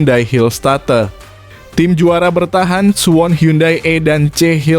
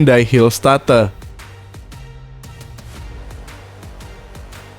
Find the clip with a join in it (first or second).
second